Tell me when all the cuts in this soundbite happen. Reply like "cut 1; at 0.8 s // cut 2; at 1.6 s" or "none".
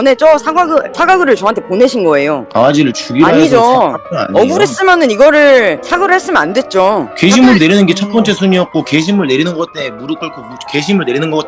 cut 1; at 2.4 s // cut 2; at 7.1 s